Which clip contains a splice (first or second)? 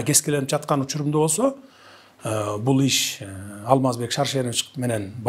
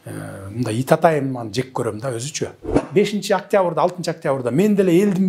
second